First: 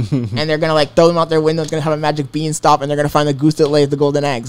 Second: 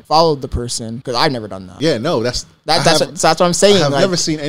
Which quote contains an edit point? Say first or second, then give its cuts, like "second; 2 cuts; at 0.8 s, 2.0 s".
second; 2 cuts; at 1.0 s, 1.7 s